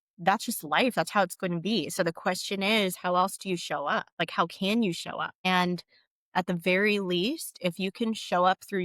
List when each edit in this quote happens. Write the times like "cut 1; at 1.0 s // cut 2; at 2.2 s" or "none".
cut 1; at 4.1 s // cut 2; at 5.3 s